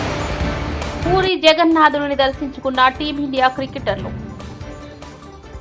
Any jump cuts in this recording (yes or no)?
no